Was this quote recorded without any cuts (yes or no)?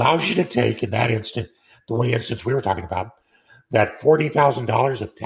yes